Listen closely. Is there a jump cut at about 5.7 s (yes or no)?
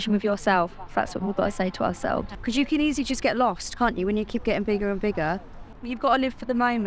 yes